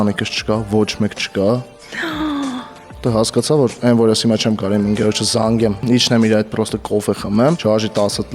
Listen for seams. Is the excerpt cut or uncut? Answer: cut